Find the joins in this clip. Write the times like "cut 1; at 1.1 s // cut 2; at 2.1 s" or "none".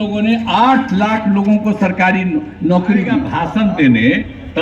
cut 1; at 3.4 s